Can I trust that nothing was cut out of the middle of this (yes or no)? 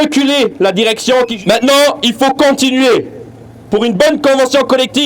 no